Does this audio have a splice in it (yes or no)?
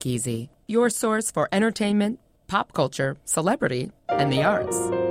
no